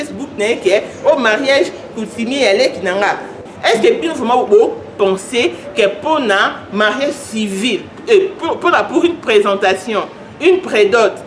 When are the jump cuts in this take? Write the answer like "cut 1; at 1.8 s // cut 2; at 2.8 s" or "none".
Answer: cut 1; at 3.4 s

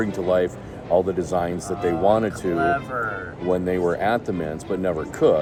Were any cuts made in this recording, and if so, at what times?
none

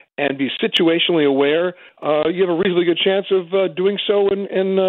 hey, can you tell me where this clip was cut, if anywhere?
cut 1; at 1.9 s

